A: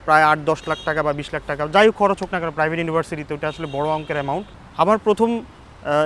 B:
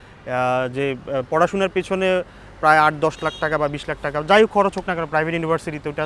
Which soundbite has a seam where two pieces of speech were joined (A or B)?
A